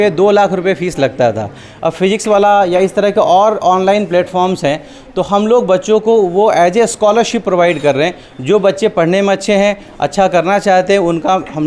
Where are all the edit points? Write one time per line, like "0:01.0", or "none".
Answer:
none